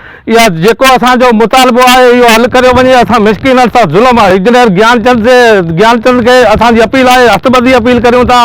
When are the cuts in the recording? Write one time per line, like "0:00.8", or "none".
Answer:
0:04.3